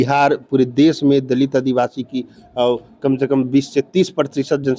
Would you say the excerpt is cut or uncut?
uncut